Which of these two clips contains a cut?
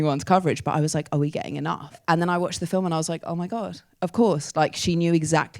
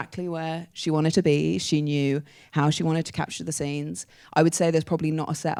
first; 1 cut; at 2.0 s

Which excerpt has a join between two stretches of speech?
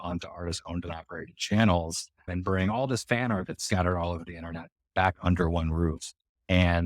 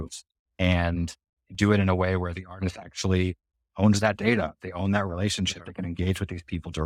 first; 1 cut; at 2.3 s

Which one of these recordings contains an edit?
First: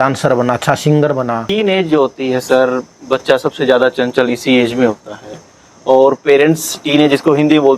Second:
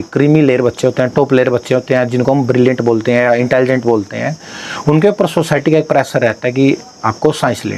first; 1 cut; at 1.5 s

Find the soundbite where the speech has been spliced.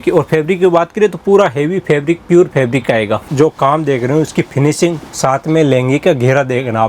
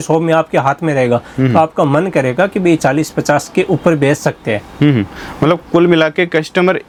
first; 1 cut; at 3.3 s

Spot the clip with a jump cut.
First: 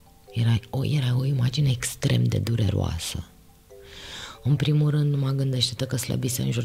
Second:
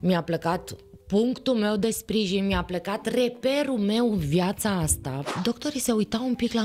second; 1 cut; at 5.2 s

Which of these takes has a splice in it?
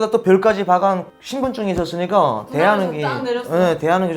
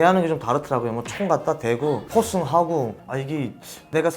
second; 1 cut; at 3.0 s

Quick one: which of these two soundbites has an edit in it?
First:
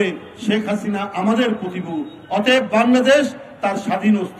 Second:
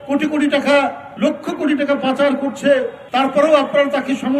second; 2 cuts; at 1.0 s, 3.0 s

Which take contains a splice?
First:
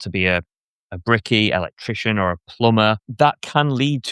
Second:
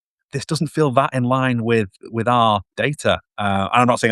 first; 1 cut; at 3.1 s

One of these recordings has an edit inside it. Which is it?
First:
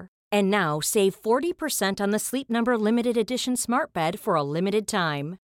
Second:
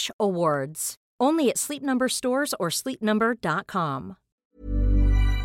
second; 1 cut; at 4.4 s

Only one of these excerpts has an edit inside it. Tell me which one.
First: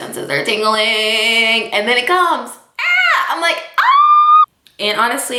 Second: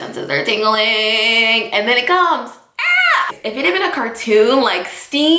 second; 1 cut; at 3.3 s

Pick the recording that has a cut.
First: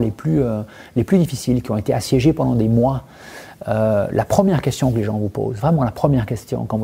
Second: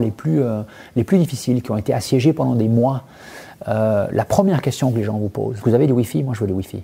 second; 1 cut; at 5.6 s

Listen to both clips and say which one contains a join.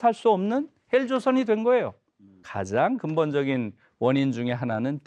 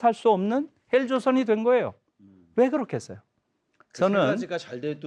first; 1 cut; at 2.4 s

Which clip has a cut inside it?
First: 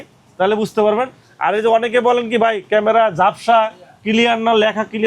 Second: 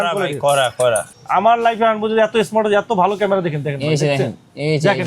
second; 1 cut; at 1.1 s

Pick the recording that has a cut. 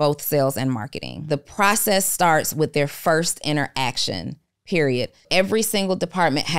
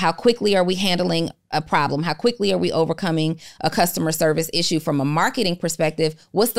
first; 2 cuts; at 1.2 s, 5.3 s

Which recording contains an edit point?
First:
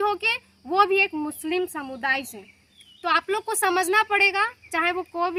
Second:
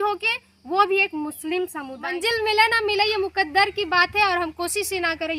second; 1 cut; at 2.2 s

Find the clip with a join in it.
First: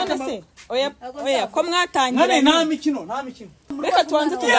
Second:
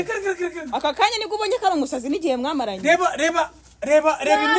first; 1 cut; at 3.7 s

